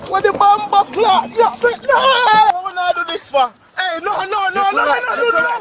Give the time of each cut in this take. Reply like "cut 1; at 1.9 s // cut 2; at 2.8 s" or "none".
cut 1; at 2.5 s